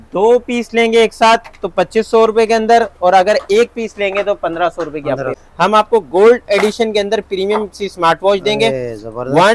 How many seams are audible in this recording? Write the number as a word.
one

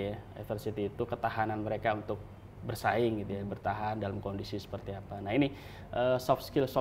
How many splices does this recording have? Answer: zero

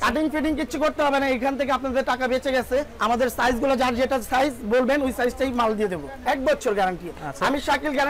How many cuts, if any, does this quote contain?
two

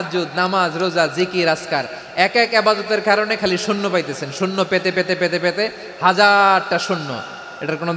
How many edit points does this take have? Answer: zero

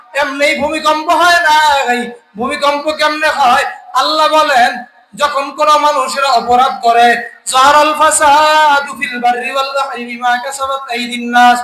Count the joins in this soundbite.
zero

